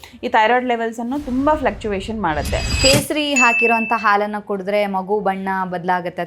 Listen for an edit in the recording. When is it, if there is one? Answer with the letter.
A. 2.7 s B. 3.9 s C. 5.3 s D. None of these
A